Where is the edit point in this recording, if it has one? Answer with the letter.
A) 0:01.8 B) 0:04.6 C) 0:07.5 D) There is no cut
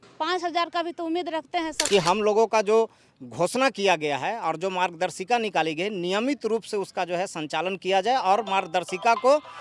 A